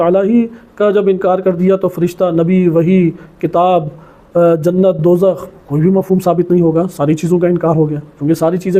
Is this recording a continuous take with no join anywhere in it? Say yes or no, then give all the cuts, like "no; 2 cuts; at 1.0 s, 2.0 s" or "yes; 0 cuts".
yes; 0 cuts